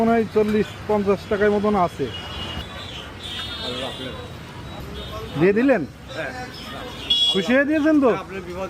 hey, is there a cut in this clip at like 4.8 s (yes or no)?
yes